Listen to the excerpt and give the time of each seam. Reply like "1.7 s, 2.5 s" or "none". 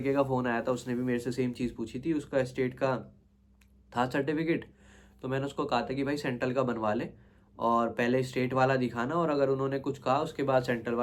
none

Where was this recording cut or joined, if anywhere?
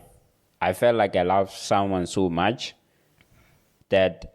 none

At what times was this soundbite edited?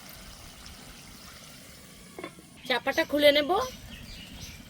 2.6 s

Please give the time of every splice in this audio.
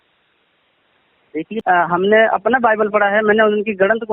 1.5 s

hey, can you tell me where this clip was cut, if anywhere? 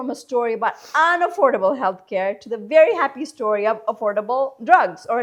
none

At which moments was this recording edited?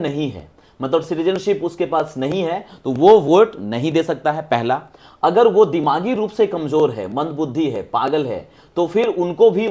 none

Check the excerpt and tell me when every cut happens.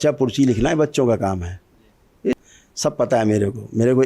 2.3 s

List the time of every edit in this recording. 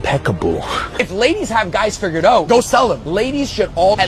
0.9 s

